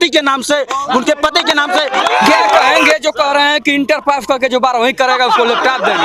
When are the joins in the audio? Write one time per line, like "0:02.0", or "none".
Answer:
0:02.6